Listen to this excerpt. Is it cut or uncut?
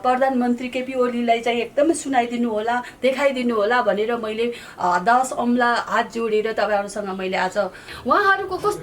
cut